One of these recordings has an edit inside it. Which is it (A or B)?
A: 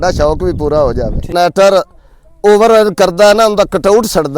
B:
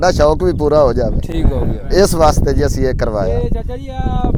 A